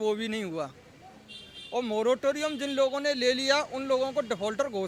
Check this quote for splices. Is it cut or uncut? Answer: uncut